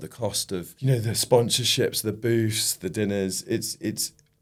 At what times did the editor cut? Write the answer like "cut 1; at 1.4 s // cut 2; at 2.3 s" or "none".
none